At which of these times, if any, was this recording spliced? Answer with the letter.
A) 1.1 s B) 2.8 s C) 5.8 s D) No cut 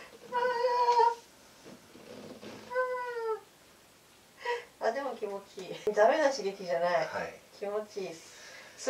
C